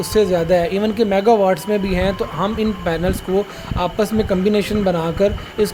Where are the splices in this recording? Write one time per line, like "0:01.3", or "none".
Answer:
none